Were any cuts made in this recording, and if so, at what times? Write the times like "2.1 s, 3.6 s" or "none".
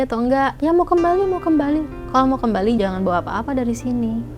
2.0 s, 2.8 s